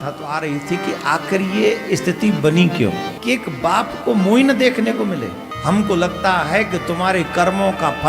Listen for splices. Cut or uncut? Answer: cut